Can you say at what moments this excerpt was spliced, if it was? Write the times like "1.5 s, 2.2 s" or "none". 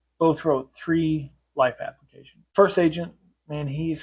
2.5 s